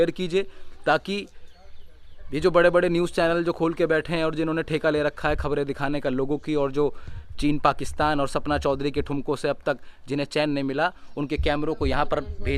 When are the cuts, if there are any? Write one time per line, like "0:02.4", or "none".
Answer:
none